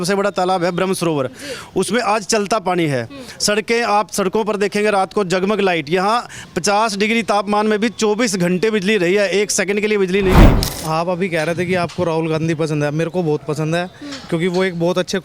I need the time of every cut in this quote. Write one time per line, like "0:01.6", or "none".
0:10.6